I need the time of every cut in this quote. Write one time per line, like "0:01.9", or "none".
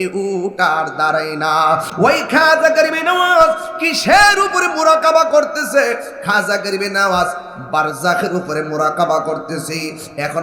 0:01.9

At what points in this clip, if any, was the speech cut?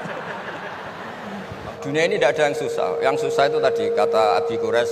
0:01.8

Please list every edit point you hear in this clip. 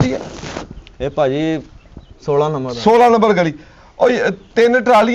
none

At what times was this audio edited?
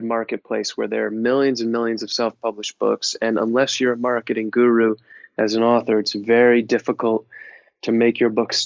none

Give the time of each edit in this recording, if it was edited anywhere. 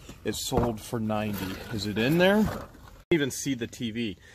0:03.1

